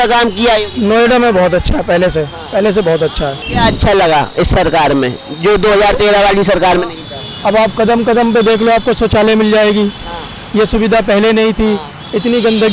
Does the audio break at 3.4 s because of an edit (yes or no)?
yes